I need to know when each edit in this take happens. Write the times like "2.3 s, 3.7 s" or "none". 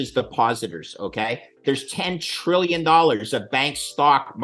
1.6 s

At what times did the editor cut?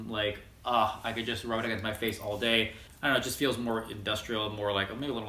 2.8 s

